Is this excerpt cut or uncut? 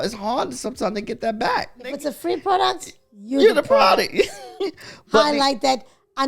cut